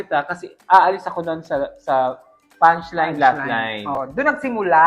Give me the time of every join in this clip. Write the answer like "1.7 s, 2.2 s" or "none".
4.0 s